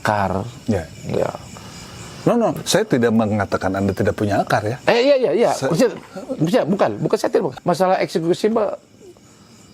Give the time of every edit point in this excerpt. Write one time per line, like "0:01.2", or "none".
0:07.5